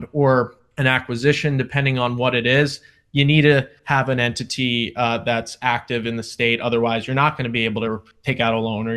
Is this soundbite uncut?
no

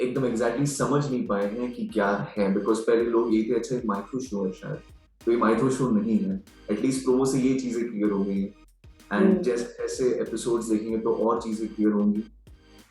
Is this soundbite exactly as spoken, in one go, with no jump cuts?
yes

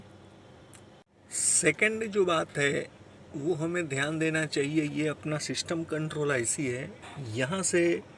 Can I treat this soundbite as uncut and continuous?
no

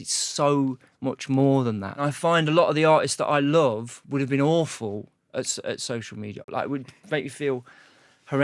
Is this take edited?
yes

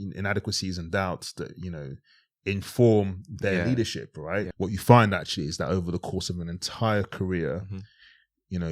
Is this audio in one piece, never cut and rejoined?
no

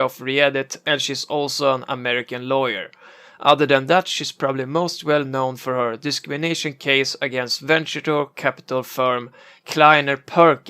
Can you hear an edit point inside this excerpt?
yes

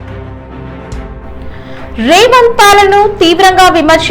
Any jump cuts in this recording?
yes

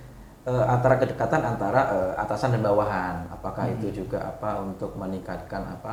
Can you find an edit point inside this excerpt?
no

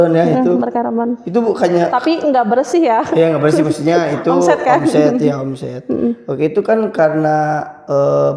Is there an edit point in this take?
no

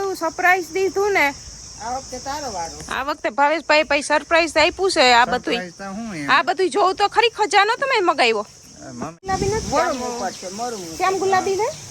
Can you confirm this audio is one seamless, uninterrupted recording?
no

